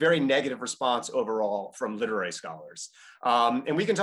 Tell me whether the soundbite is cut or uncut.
uncut